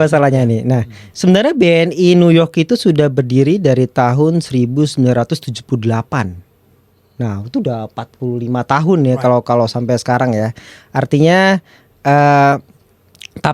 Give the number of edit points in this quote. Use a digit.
0